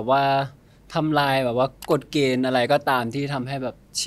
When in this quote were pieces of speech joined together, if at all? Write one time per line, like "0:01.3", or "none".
none